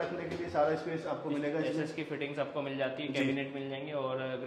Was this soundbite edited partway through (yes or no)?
no